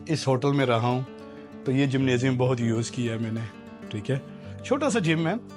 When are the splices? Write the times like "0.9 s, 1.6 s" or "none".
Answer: none